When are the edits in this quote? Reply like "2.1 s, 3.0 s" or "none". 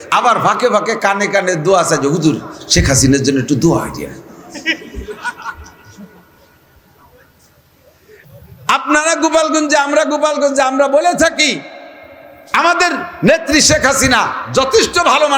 8.2 s